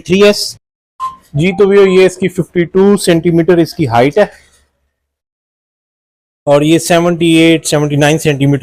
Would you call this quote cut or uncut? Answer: uncut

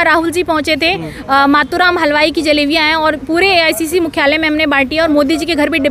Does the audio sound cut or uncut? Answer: uncut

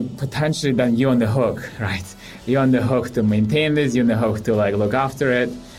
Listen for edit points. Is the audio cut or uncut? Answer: uncut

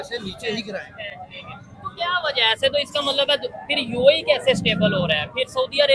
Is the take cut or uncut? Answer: uncut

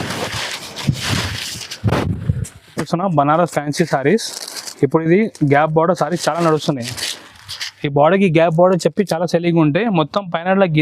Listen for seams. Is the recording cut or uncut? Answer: cut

